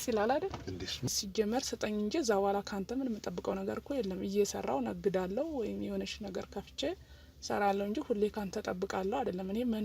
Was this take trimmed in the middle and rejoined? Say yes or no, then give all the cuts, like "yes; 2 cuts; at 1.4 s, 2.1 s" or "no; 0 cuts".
yes; 1 cut; at 1.1 s